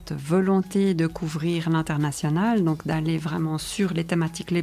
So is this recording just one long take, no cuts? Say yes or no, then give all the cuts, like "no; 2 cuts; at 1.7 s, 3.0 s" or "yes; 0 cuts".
yes; 0 cuts